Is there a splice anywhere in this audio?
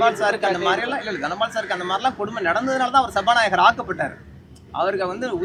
no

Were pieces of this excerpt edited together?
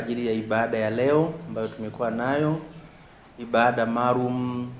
no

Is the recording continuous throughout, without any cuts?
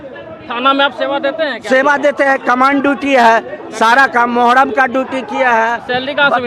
yes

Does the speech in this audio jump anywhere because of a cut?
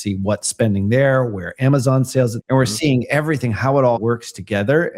yes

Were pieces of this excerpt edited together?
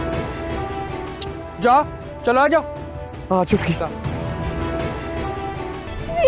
no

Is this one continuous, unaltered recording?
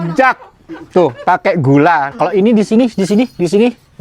yes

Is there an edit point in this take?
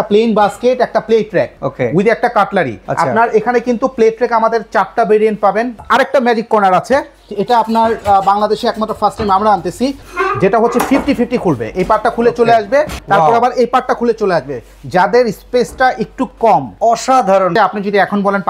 yes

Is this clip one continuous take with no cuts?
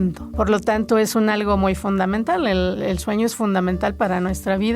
no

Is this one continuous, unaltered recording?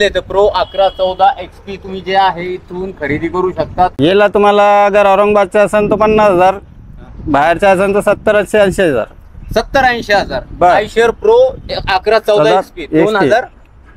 no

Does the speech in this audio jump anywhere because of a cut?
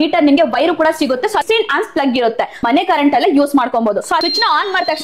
yes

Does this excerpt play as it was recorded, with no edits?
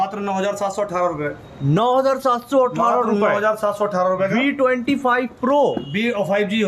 yes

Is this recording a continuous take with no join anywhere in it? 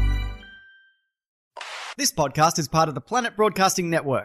no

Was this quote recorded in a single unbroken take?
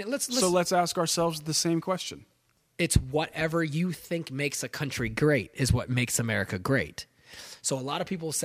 no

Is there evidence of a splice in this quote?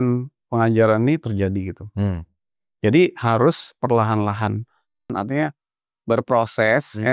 yes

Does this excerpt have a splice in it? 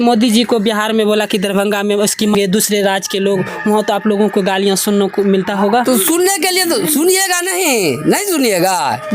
yes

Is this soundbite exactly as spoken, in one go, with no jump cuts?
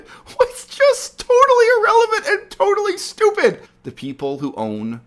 no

